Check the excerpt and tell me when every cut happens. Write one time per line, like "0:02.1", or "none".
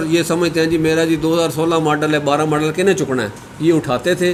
none